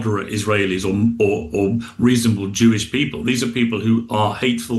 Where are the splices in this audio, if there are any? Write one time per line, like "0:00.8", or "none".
none